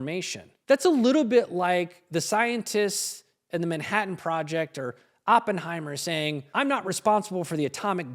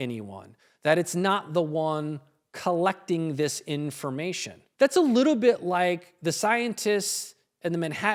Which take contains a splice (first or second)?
first